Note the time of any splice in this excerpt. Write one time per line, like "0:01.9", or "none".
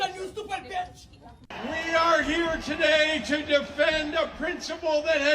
0:01.5

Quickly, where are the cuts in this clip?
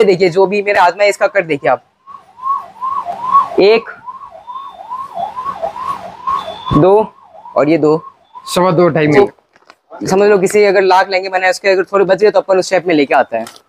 0:09.1

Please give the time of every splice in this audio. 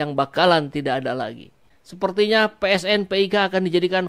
0:01.7

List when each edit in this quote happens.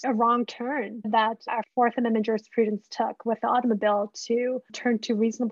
none

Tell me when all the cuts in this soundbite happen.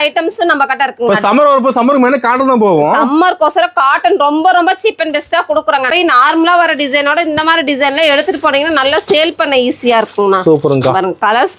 0:05.9

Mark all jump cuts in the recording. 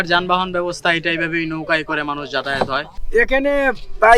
0:02.9

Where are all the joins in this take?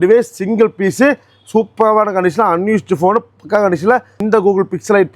0:04.2

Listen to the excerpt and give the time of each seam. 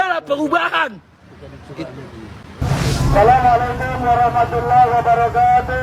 0:02.6

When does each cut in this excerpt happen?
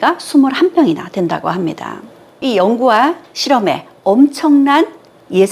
0:02.4

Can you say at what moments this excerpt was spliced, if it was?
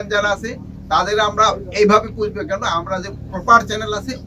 none

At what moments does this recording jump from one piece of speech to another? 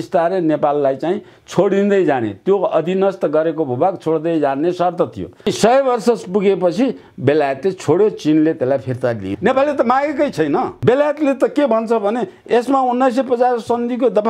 0:05.5
0:09.3
0:10.8

